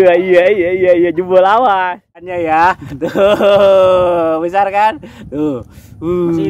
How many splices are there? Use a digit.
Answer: 1